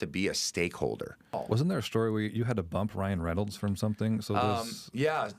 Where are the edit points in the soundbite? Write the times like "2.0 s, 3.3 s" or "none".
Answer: 1.4 s